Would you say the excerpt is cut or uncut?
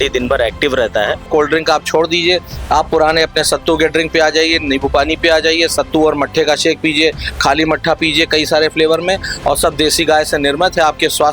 cut